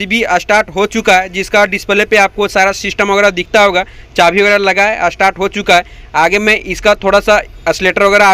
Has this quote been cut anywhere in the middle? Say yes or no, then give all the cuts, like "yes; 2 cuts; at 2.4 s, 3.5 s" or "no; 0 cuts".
no; 0 cuts